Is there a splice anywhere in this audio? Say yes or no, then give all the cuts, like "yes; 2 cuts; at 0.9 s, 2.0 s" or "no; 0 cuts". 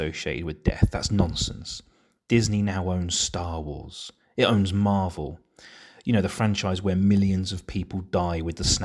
no; 0 cuts